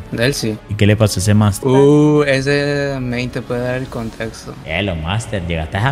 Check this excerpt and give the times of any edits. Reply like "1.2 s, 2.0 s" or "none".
4.6 s